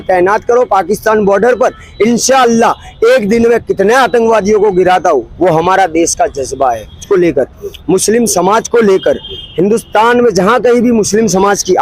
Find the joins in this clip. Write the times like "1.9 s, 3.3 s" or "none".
7.0 s